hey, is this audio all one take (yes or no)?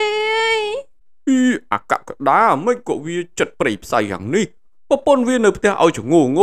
yes